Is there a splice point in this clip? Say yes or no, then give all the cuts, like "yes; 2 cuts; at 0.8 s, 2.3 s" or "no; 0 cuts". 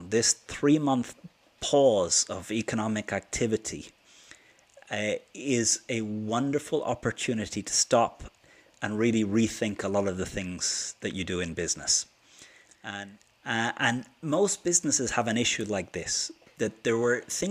yes; 1 cut; at 13.0 s